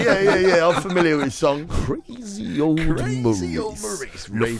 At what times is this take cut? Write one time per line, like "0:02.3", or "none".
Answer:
0:01.7